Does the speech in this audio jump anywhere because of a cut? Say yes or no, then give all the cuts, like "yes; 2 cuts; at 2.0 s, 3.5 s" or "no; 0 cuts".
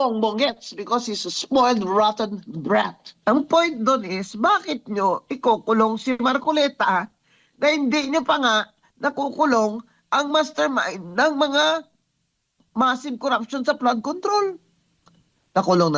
yes; 1 cut; at 3.0 s